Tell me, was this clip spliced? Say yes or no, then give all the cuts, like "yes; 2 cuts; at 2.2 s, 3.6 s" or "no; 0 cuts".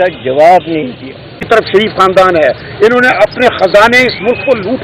yes; 1 cut; at 1.3 s